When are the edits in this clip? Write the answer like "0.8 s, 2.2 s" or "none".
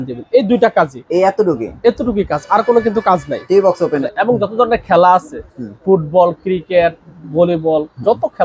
4.1 s